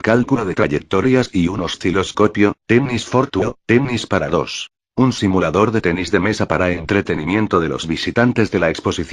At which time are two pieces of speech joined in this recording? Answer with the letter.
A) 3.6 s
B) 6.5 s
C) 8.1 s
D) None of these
C